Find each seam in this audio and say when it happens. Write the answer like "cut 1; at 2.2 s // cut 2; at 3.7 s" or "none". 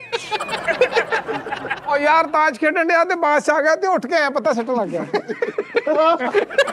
cut 1; at 1.8 s